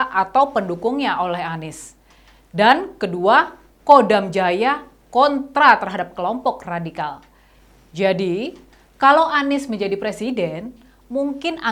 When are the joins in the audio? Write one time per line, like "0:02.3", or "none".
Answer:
none